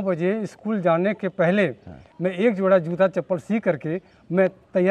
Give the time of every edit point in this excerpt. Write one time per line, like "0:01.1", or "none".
none